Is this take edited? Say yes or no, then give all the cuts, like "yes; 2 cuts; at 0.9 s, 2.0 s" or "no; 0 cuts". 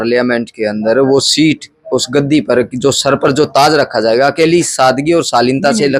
no; 0 cuts